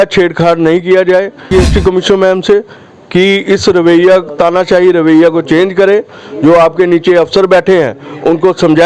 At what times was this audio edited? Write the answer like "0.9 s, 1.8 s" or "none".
1.5 s